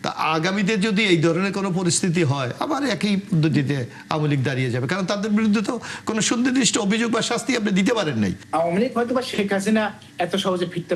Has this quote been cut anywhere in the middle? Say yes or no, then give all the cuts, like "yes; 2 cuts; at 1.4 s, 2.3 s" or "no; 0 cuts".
yes; 1 cut; at 8.4 s